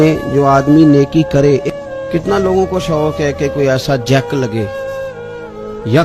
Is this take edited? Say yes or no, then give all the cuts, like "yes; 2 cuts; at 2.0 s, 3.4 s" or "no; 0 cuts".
yes; 1 cut; at 1.7 s